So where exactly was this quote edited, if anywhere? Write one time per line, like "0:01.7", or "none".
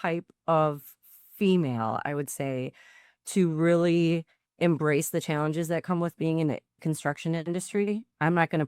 0:06.8